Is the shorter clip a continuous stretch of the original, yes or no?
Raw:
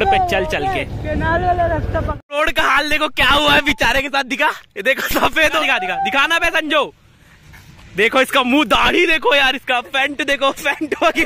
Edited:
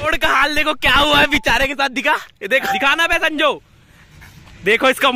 no